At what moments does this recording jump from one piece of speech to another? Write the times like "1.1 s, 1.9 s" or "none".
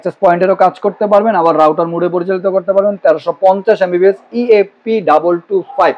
none